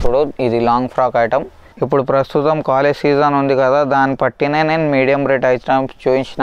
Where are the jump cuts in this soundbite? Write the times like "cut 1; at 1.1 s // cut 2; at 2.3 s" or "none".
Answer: cut 1; at 1.7 s